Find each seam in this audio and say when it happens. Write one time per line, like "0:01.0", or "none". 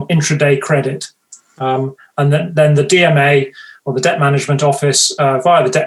none